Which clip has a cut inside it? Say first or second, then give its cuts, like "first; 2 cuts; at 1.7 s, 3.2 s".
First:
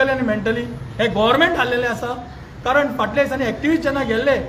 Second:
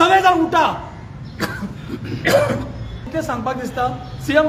second; 1 cut; at 3.0 s